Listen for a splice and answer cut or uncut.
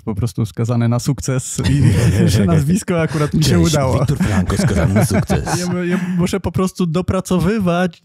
cut